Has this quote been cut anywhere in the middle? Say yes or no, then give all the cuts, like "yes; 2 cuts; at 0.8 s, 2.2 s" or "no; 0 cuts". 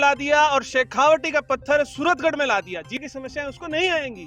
yes; 1 cut; at 3.0 s